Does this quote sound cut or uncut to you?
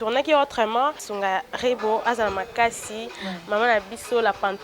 cut